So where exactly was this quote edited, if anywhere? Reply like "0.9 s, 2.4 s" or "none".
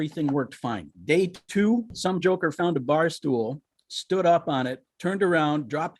0.9 s, 1.9 s, 4.9 s